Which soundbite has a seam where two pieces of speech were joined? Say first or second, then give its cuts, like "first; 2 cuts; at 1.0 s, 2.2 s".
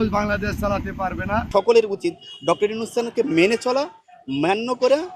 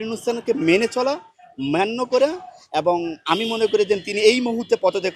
first; 1 cut; at 1.5 s